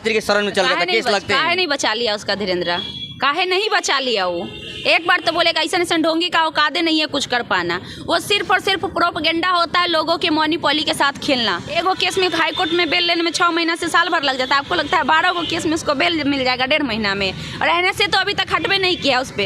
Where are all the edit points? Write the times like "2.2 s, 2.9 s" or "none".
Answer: 11.7 s